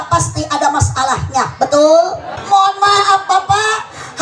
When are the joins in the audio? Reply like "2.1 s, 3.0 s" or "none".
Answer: 2.4 s